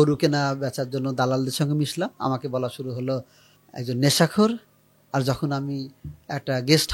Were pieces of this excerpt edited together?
no; 0 cuts

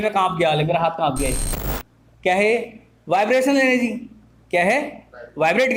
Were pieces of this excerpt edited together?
no; 0 cuts

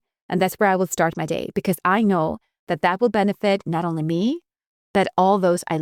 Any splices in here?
no; 0 cuts

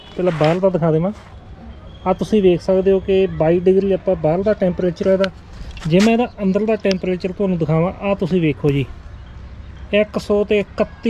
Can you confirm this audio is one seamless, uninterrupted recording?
yes; 0 cuts

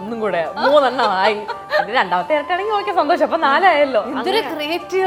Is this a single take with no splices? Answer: yes; 0 cuts

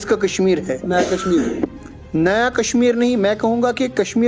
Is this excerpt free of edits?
yes; 0 cuts

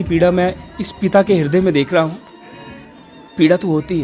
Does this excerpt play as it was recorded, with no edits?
yes; 0 cuts

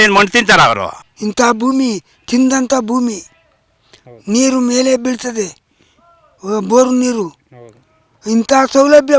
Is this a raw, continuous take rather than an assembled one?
no; 1 cut; at 1.0 s

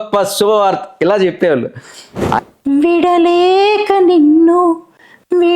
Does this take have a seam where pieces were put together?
yes; 1 cut; at 2.4 s

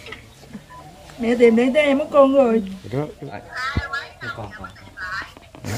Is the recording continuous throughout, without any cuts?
no; 1 cut; at 3.5 s

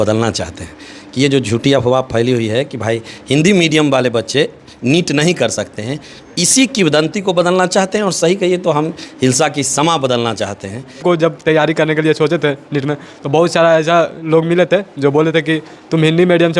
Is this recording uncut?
no; 1 cut; at 11.0 s

